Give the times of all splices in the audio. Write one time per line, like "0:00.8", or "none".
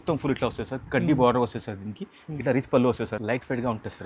0:03.1

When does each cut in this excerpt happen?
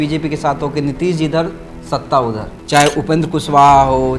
0:02.5

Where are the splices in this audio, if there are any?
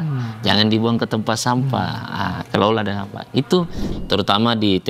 0:03.8

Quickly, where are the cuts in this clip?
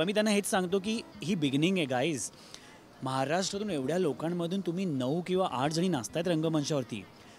none

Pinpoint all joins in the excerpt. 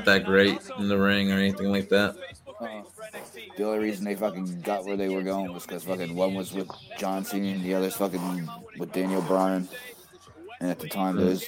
none

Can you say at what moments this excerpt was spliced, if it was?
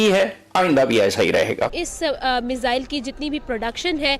0:01.9

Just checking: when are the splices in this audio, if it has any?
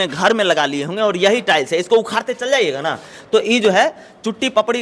none

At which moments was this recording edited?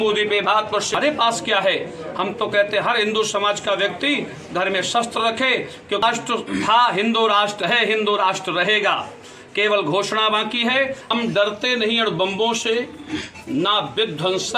0:00.9
0:06.0
0:11.1

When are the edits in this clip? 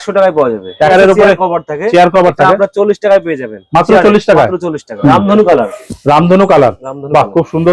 0:00.9
0:04.8

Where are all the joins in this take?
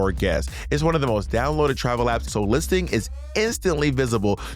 0:02.3

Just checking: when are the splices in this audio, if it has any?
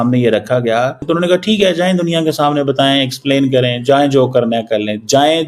0:01.0

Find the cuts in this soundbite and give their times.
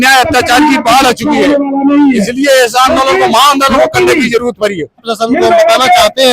0:05.0

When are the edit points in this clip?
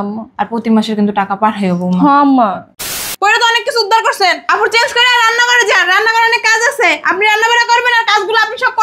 0:03.1

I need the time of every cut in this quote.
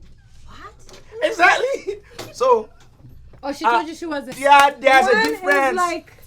0:04.3

